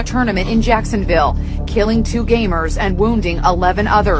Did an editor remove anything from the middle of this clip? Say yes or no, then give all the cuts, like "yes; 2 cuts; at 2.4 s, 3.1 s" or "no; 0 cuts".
no; 0 cuts